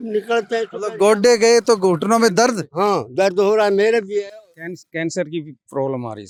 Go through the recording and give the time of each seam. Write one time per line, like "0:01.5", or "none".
none